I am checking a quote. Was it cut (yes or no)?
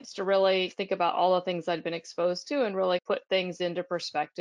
no